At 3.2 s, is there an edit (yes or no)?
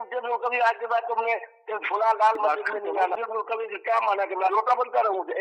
yes